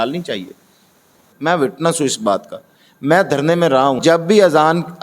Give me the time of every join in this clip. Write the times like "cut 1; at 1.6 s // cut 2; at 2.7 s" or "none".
cut 1; at 1.0 s // cut 2; at 4.0 s